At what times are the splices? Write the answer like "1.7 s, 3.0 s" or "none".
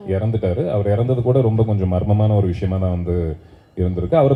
none